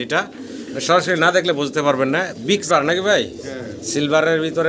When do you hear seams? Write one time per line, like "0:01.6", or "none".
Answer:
0:02.6